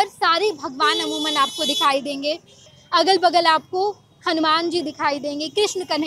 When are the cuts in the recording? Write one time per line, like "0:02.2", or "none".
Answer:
0:02.7